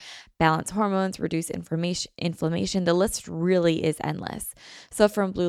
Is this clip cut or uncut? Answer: uncut